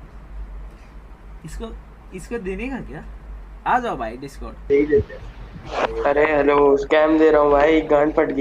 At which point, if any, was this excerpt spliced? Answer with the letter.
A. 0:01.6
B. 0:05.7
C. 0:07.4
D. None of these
B